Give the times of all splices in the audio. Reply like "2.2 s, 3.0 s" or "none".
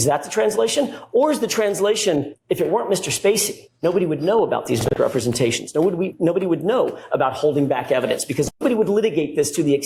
none